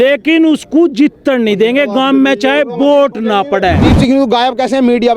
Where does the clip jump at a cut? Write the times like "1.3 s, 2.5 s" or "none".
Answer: 3.9 s